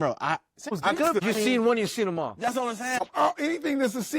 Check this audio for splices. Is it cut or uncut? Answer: cut